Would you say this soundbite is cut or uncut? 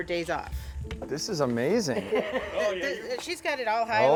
uncut